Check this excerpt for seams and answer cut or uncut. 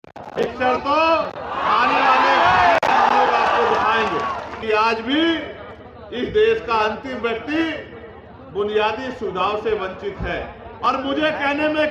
cut